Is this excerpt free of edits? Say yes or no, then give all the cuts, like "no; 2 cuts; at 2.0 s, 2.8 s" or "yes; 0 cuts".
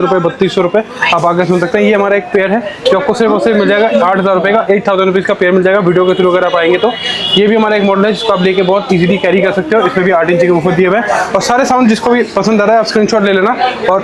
yes; 0 cuts